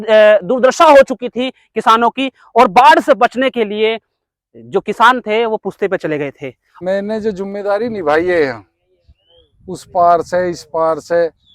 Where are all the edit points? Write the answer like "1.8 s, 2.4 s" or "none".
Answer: 6.7 s